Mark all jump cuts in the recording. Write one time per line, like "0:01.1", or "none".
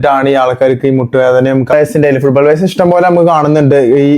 0:01.7